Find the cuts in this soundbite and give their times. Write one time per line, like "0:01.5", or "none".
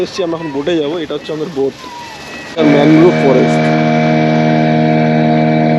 0:02.5